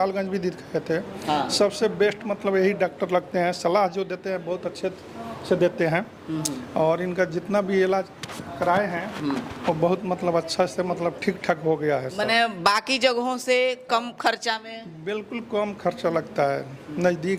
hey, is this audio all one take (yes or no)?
yes